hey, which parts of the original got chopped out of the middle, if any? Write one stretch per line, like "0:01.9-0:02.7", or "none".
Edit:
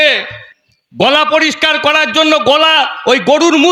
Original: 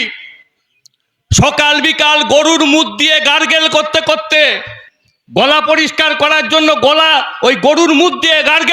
none